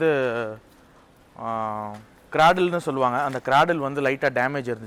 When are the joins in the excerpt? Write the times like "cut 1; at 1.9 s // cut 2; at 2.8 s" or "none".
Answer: none